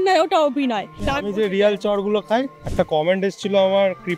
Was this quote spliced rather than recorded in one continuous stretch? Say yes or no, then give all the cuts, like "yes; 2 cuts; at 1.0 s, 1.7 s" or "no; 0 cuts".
yes; 2 cuts; at 1.0 s, 2.6 s